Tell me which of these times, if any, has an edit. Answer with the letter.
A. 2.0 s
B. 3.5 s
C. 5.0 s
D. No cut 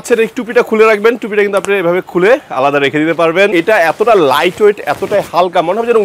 B